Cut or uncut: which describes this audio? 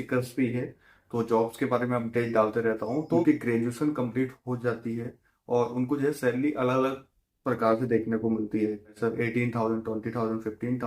cut